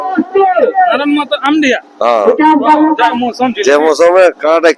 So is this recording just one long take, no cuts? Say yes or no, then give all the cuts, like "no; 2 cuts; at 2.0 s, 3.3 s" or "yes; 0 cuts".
no; 1 cut; at 3.1 s